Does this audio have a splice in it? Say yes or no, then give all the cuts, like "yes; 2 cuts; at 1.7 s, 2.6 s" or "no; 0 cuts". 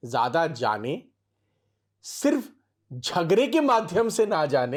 no; 0 cuts